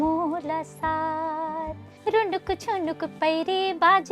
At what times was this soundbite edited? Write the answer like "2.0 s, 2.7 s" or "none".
1.8 s